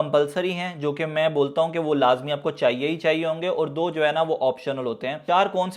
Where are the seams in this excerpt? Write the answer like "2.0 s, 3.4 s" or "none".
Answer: none